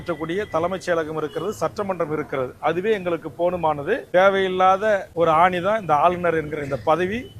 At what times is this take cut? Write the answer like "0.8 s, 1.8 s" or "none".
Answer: 4.0 s, 5.1 s